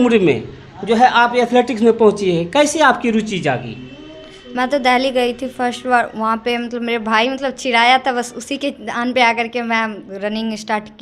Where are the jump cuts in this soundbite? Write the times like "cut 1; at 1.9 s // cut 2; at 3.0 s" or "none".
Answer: none